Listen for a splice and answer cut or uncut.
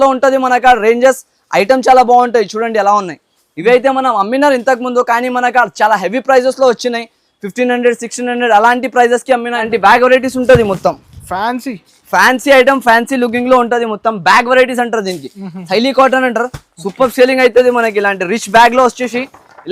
cut